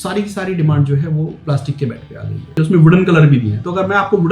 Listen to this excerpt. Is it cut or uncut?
cut